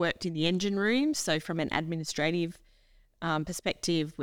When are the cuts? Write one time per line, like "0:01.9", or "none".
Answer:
none